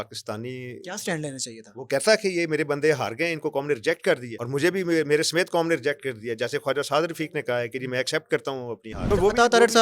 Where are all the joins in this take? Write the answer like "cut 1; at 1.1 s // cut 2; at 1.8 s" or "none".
cut 1; at 4.3 s // cut 2; at 9.0 s